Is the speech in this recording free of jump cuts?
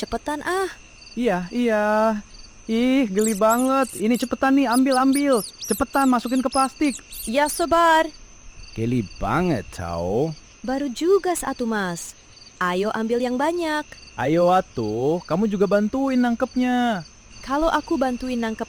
yes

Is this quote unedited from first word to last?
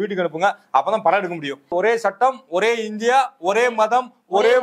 no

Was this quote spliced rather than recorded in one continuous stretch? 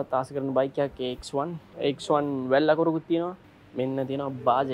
yes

